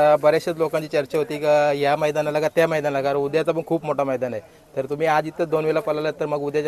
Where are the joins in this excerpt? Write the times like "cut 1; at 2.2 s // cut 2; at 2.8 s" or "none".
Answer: none